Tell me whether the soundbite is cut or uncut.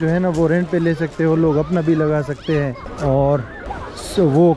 uncut